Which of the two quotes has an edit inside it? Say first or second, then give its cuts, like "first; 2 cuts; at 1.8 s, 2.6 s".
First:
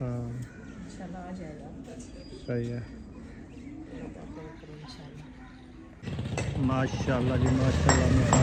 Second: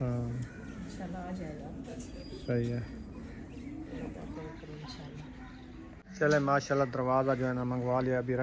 second; 1 cut; at 6.0 s